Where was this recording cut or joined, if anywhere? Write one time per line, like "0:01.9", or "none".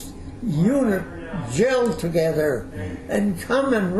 none